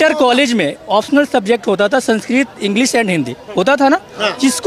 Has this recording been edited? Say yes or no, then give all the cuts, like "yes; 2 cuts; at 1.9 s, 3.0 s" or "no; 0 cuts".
no; 0 cuts